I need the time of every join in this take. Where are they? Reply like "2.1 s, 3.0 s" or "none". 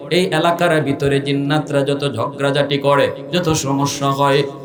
none